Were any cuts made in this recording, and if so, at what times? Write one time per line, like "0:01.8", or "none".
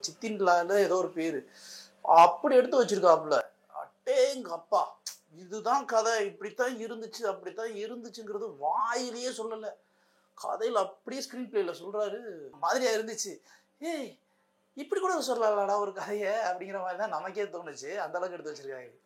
none